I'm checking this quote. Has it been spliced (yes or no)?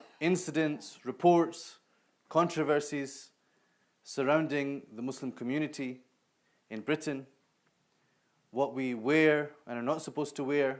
no